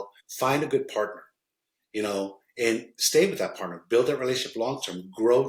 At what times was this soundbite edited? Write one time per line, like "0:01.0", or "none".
none